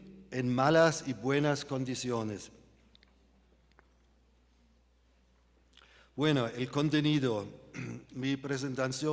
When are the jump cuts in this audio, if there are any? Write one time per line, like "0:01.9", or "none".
0:01.4